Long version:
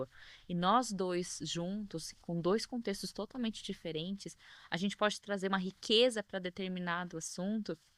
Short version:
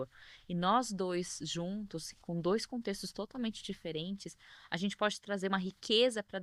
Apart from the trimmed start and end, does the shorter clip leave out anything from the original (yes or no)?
no